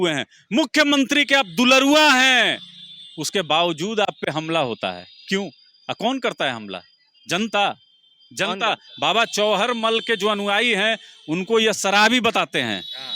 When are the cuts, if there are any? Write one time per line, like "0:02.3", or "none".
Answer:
none